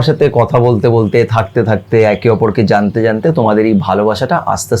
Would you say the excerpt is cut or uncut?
uncut